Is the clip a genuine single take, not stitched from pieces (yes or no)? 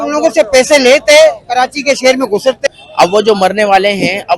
no